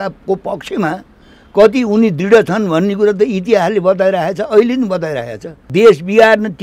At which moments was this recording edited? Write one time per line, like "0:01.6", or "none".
0:05.6